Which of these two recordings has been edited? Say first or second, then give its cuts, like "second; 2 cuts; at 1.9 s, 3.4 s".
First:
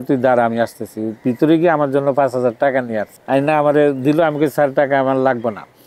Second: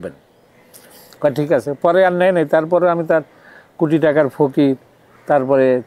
first; 1 cut; at 3.1 s